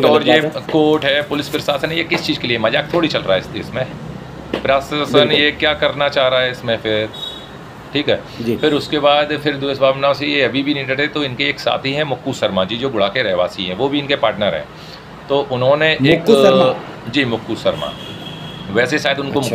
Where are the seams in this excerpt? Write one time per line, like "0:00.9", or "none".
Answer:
none